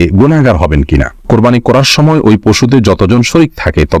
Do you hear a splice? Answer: yes; 1 cut; at 1.3 s

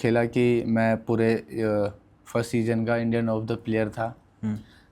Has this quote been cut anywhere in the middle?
no; 0 cuts

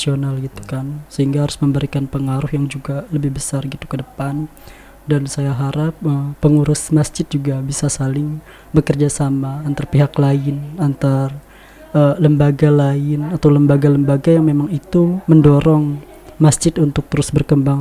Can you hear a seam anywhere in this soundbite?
no; 0 cuts

